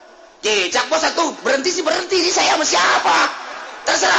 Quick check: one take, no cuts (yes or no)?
yes